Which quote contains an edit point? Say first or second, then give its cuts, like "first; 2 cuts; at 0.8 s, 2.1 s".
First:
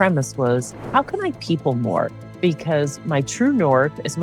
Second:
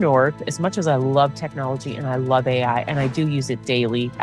first; 1 cut; at 2.2 s